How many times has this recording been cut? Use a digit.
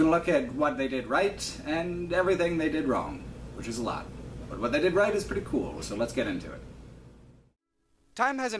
0